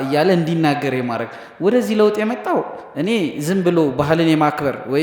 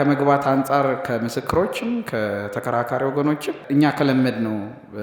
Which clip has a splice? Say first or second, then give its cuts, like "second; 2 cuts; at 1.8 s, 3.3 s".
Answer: second; 1 cut; at 3.6 s